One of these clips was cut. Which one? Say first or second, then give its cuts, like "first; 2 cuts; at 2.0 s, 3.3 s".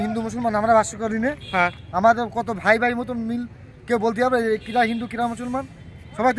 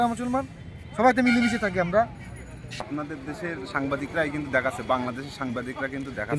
second; 1 cut; at 2.8 s